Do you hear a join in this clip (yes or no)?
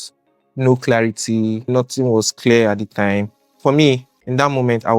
yes